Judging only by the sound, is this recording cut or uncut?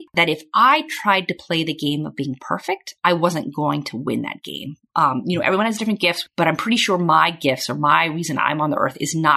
cut